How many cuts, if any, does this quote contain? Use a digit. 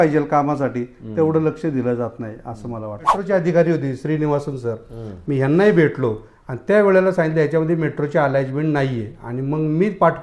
1